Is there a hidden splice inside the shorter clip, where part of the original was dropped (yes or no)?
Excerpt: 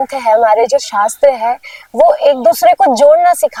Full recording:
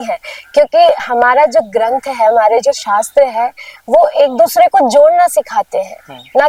no